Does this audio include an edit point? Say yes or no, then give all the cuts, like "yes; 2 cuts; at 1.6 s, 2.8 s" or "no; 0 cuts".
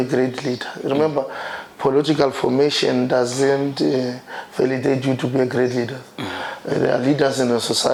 no; 0 cuts